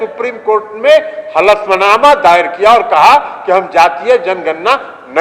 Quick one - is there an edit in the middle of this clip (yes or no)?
no